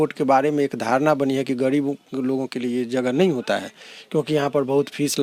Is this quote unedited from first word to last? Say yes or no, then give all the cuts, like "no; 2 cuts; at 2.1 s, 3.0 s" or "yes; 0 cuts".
yes; 0 cuts